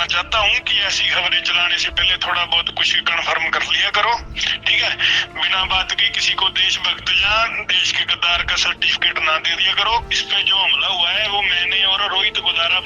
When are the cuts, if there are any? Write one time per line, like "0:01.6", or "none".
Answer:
0:10.0